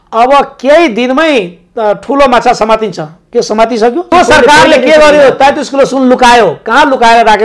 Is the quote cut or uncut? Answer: cut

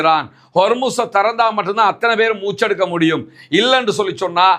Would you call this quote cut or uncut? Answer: uncut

